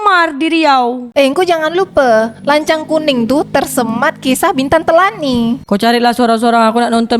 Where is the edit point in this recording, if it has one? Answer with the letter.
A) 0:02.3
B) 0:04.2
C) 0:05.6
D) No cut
C